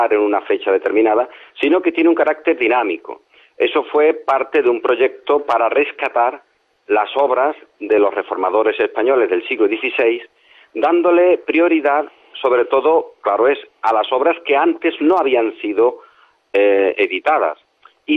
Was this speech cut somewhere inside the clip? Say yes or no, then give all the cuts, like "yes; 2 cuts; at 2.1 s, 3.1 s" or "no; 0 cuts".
no; 0 cuts